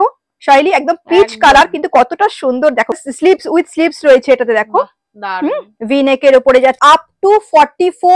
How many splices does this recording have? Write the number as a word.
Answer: two